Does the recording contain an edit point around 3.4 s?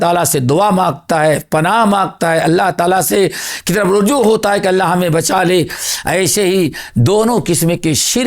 no; 0 cuts

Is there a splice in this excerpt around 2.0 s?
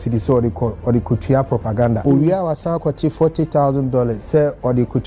yes; 2 cuts; at 2.0 s, 4.2 s

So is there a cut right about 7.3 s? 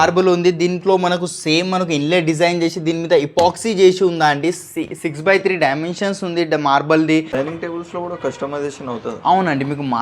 yes; 1 cut; at 7.3 s

